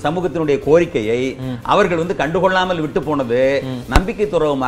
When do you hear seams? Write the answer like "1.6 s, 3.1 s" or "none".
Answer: none